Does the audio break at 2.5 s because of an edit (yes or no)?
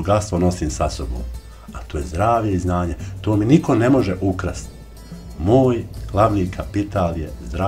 no